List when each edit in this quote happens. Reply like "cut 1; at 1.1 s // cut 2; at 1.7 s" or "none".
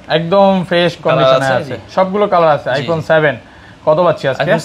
none